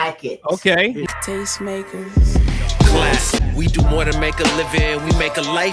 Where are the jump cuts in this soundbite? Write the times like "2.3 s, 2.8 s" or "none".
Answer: 1.0 s